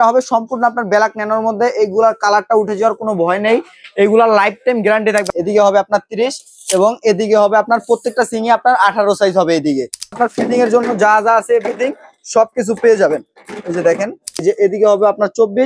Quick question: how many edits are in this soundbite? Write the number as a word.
three